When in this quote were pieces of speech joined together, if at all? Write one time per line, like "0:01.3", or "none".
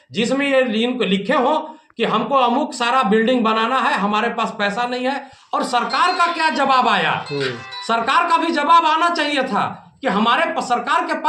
none